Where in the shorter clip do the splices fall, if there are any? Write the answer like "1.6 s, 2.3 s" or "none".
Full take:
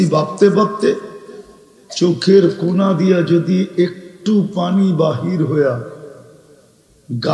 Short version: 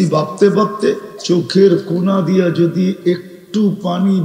1.1 s